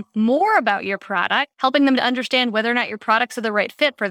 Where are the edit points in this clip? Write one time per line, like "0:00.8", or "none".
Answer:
0:01.5